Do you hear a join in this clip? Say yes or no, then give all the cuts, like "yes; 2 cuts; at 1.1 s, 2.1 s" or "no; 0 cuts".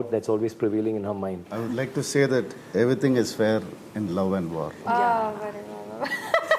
yes; 1 cut; at 1.5 s